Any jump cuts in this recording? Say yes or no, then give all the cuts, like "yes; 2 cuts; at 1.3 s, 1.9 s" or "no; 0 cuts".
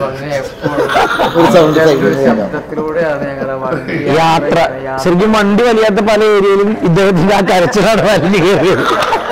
no; 0 cuts